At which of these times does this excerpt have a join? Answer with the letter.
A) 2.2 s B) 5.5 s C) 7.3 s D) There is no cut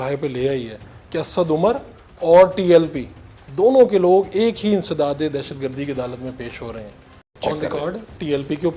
C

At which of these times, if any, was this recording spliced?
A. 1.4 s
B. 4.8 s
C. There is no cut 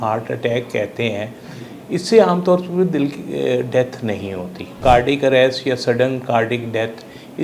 B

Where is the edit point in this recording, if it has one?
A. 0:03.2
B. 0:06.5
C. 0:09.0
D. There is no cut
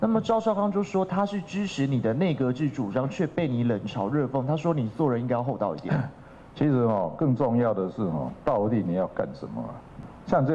D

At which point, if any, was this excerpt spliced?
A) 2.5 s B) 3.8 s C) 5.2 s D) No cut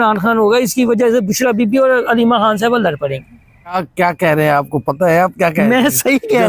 B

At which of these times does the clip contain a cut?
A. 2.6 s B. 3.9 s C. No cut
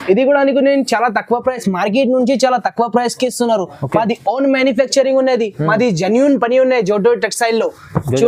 C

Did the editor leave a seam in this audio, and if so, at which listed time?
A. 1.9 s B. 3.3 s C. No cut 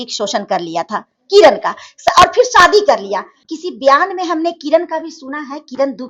B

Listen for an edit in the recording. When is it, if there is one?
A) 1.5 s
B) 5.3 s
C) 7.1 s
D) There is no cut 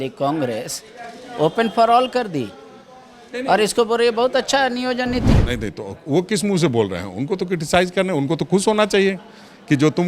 B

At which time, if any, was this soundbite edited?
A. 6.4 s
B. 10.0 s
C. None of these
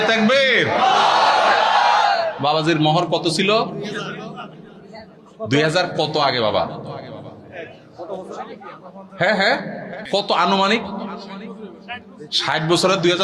B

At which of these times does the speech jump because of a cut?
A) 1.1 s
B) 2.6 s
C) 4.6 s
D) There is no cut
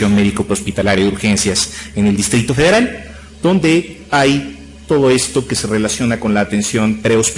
A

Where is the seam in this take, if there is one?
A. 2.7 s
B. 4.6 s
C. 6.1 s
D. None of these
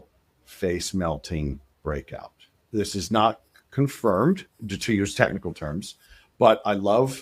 A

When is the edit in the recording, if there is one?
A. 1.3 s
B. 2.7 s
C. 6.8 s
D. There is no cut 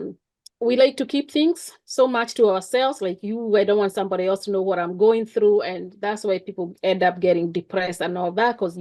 D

